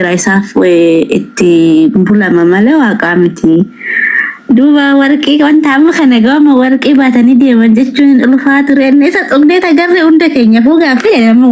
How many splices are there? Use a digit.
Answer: 0